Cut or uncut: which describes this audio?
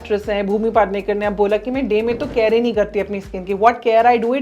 uncut